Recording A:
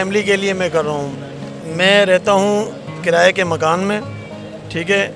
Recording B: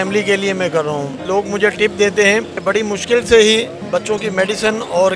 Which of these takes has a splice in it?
B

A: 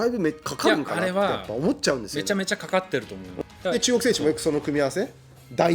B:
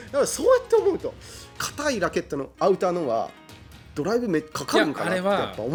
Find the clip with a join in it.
A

